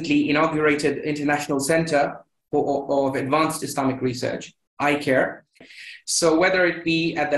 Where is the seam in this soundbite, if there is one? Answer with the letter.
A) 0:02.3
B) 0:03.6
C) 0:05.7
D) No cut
C